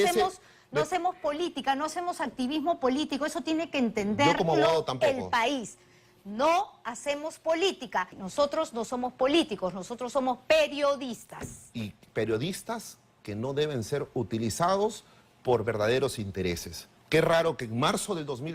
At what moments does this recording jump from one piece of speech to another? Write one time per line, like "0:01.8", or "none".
0:08.2

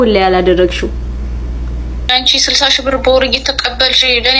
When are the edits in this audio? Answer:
0:02.1

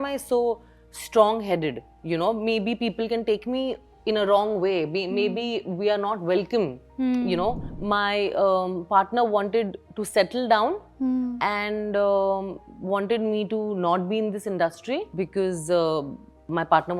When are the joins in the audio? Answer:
0:07.7

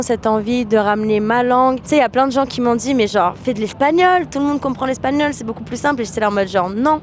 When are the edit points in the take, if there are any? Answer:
0:01.8

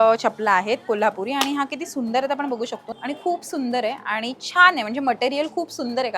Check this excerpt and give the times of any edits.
0:02.8

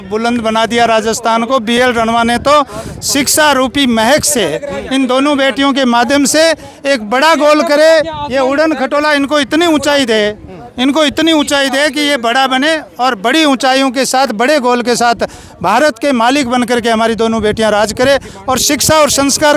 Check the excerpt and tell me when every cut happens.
none

